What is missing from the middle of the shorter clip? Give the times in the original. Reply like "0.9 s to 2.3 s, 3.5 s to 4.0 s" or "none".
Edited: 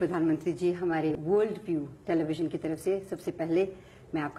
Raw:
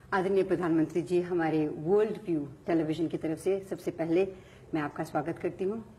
1.6 s to 1.8 s